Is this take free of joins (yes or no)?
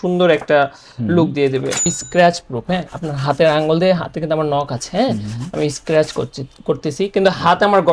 no